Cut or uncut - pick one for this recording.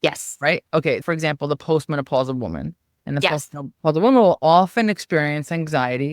cut